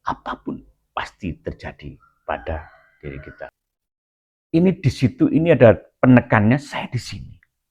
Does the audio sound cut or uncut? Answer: cut